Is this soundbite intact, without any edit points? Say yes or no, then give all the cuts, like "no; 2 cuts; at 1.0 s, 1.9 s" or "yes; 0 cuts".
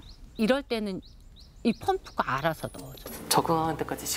no; 1 cut; at 3.1 s